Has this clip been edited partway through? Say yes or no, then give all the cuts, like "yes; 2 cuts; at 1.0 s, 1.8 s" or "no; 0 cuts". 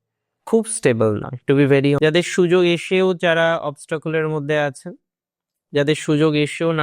yes; 1 cut; at 2.0 s